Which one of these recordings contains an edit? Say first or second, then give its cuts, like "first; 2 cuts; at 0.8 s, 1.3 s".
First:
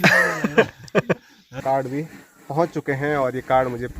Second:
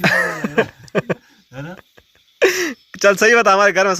first; 1 cut; at 1.6 s